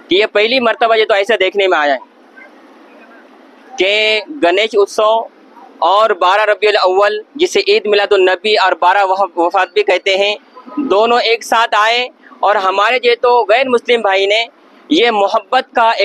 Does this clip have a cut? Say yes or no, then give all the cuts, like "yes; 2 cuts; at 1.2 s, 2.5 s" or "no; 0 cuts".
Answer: no; 0 cuts